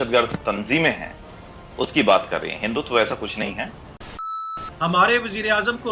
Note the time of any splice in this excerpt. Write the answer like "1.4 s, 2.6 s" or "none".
4.3 s